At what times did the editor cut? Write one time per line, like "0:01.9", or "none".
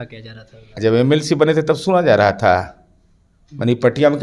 none